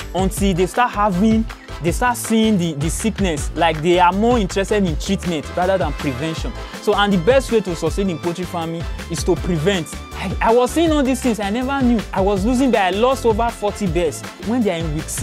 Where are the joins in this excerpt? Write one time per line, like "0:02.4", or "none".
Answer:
0:10.0
0:12.1
0:14.4